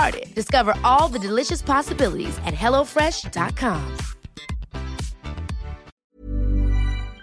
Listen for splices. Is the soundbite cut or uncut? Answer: cut